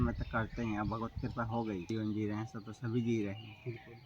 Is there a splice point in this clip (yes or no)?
yes